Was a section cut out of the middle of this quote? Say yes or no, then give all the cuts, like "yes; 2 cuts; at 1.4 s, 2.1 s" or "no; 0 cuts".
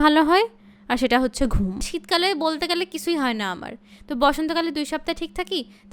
yes; 1 cut; at 1.9 s